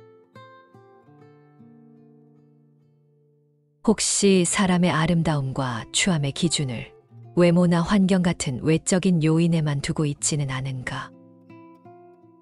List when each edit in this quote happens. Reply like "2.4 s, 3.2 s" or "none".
3.8 s